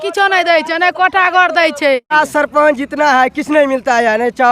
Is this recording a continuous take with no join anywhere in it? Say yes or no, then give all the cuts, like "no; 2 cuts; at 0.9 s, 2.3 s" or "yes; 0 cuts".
no; 1 cut; at 2.1 s